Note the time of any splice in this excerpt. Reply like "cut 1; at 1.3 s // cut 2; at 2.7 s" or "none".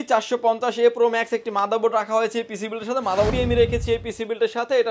cut 1; at 3.3 s